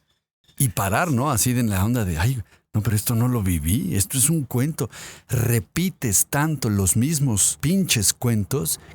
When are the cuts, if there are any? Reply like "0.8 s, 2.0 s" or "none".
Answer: 7.5 s